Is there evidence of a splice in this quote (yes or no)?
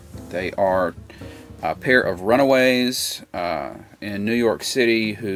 no